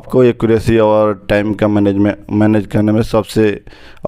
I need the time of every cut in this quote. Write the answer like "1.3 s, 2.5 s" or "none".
none